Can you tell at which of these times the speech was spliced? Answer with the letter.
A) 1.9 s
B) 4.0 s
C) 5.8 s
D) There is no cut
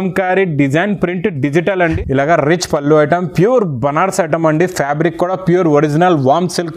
A